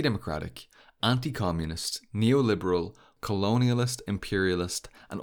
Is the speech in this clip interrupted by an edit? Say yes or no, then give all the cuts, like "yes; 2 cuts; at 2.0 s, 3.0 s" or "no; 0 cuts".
yes; 1 cut; at 3.1 s